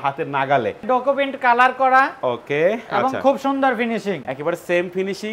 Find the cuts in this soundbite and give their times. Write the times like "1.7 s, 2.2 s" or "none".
0.8 s, 4.3 s